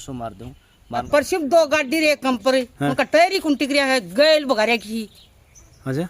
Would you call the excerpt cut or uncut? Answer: cut